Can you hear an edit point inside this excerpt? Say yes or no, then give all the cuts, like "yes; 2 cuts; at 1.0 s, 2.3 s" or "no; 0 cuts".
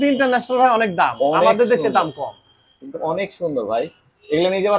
no; 0 cuts